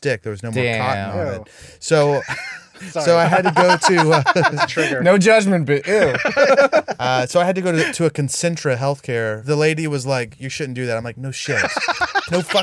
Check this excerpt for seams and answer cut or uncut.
cut